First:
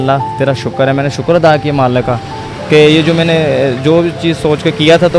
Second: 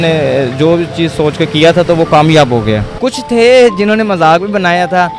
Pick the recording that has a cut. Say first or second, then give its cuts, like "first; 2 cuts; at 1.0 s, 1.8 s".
second; 1 cut; at 2.9 s